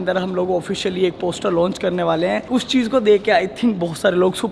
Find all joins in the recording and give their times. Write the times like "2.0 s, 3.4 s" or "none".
none